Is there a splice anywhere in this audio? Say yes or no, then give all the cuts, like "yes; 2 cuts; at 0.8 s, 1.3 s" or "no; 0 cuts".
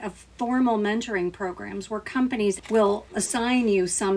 yes; 1 cut; at 2.6 s